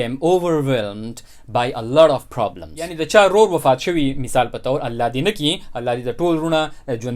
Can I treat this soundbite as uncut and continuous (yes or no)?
no